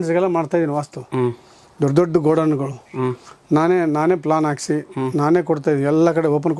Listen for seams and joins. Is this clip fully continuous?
yes; 0 cuts

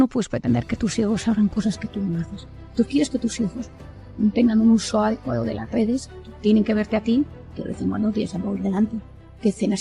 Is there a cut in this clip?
no; 0 cuts

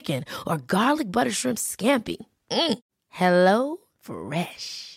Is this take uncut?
yes; 0 cuts

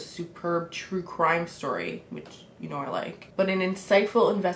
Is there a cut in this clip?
yes; 1 cut; at 3.2 s

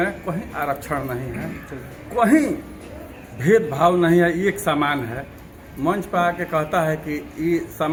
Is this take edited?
no; 0 cuts

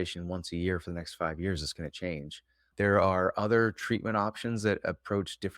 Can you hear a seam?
yes; 1 cut; at 2.7 s

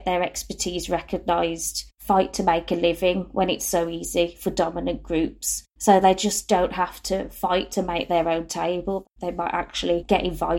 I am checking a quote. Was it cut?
no; 0 cuts

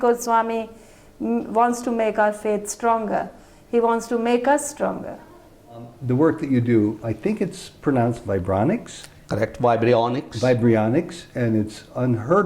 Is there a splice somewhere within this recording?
yes; 1 cut; at 5.9 s

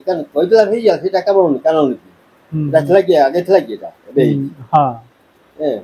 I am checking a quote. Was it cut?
no; 0 cuts

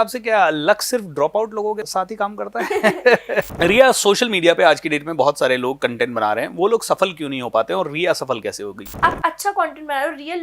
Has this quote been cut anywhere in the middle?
yes; 3 cuts; at 1.8 s, 3.5 s, 8.8 s

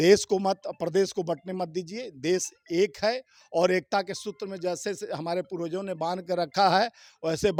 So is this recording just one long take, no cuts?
yes; 0 cuts

